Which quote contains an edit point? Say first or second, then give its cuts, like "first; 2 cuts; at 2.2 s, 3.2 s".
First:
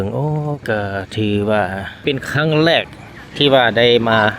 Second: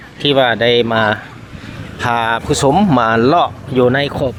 first; 1 cut; at 2.0 s